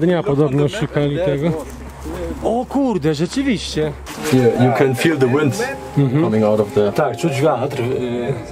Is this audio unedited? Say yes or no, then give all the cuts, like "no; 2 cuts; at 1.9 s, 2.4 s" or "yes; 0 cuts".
no; 1 cut; at 4.0 s